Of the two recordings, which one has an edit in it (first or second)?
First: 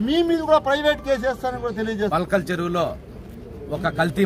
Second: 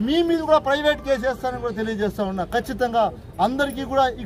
first